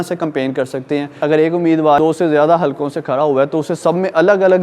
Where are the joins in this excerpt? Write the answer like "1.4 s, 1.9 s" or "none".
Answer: 1.1 s, 2.0 s